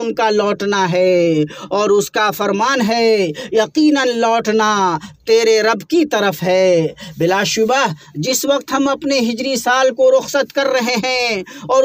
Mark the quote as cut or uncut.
uncut